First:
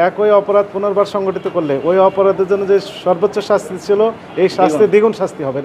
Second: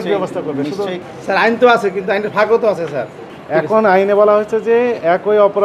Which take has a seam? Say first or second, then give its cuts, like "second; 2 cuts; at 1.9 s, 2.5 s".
second; 2 cuts; at 1.0 s, 3.3 s